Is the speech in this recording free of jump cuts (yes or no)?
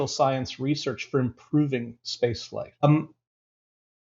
no